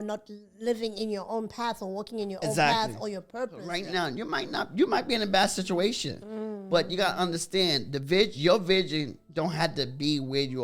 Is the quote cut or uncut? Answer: cut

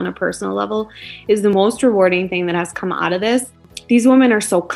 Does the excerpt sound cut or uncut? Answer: cut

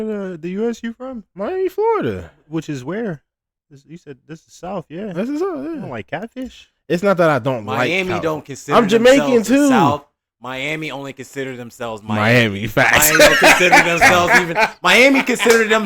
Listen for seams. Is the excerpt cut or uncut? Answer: uncut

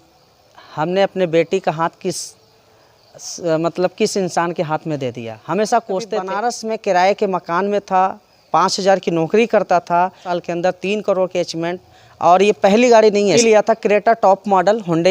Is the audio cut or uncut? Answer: cut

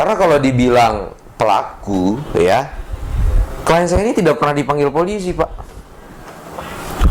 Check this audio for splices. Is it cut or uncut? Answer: uncut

